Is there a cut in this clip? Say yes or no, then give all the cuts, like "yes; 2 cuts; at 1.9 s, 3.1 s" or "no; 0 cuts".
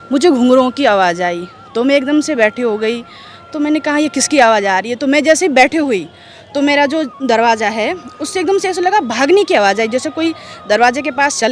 no; 0 cuts